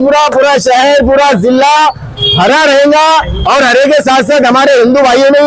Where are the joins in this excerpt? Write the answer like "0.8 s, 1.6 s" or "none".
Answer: none